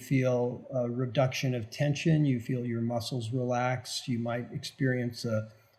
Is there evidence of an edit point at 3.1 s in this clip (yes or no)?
no